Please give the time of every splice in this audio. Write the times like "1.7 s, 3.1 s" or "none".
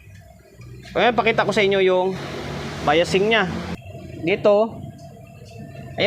4.0 s